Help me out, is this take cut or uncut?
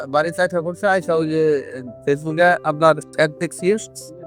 uncut